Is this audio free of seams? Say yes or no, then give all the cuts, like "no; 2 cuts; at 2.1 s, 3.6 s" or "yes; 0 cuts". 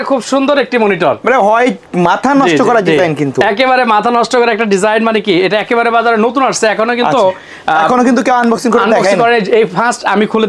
yes; 0 cuts